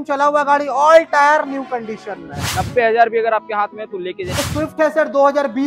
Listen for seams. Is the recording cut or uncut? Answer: cut